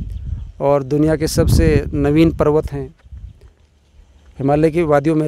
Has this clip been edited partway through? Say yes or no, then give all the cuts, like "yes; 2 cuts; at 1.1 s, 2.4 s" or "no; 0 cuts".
no; 0 cuts